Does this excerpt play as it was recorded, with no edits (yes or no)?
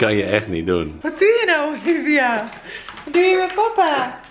no